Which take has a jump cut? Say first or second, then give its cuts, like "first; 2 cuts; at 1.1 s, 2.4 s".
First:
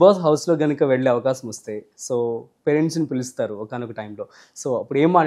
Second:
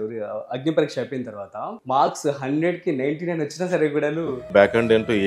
second; 2 cuts; at 1.8 s, 4.4 s